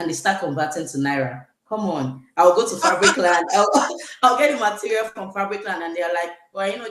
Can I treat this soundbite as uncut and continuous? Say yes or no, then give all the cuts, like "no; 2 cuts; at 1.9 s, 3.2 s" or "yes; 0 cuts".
yes; 0 cuts